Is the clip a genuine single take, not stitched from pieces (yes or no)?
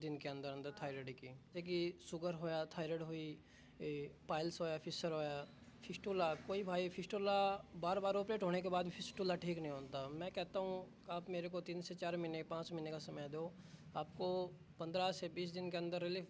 no